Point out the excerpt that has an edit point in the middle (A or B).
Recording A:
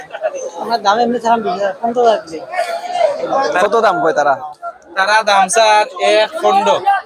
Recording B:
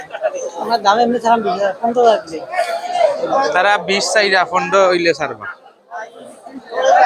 A